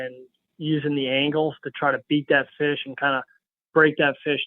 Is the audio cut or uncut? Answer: uncut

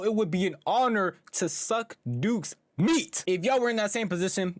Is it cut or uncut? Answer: cut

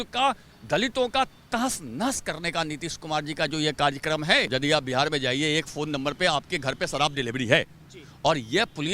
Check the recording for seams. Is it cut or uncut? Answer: cut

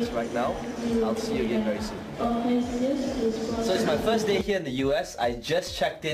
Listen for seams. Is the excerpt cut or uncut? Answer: uncut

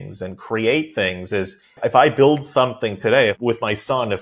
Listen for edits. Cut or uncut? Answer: cut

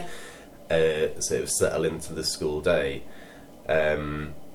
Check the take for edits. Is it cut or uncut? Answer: uncut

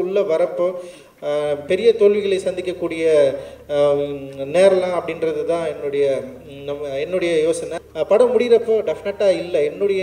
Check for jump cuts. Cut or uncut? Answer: cut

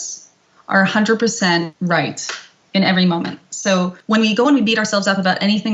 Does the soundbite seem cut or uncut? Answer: cut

